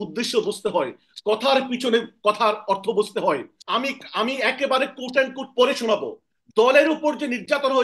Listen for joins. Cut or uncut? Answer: cut